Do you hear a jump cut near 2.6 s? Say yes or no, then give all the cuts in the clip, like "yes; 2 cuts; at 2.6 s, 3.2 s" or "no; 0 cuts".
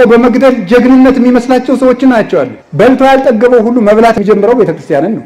yes; 2 cuts; at 2.6 s, 4.2 s